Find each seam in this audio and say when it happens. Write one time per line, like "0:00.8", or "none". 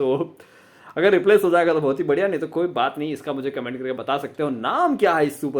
none